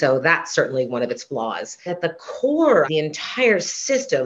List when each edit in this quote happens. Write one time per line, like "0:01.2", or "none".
0:01.9
0:02.9